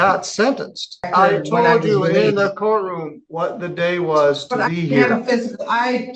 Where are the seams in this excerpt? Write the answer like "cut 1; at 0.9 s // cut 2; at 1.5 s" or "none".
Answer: cut 1; at 1.1 s